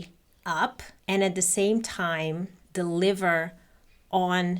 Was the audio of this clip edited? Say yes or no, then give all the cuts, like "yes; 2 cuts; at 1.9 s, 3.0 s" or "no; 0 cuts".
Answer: yes; 2 cuts; at 0.9 s, 2.6 s